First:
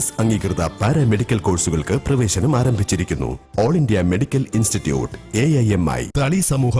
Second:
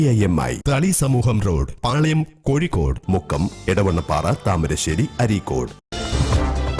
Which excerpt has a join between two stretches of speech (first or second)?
second